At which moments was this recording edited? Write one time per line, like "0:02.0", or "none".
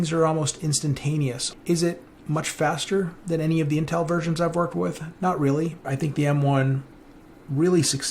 0:01.5
0:05.9